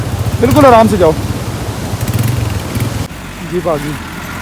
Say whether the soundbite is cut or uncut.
cut